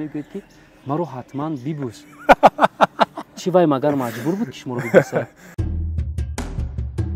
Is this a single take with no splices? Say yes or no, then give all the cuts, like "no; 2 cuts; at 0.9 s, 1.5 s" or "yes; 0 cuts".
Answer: yes; 0 cuts